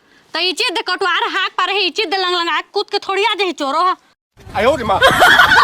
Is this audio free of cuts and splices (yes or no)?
no